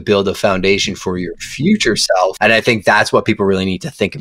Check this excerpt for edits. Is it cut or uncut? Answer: cut